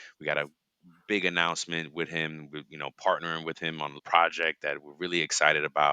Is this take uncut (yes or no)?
no